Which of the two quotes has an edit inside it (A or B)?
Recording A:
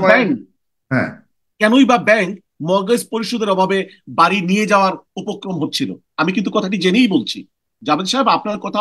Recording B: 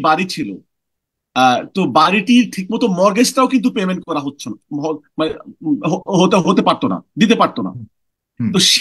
A